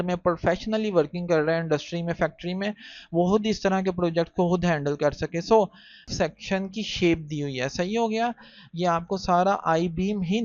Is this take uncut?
no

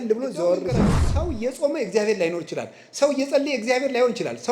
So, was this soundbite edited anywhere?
yes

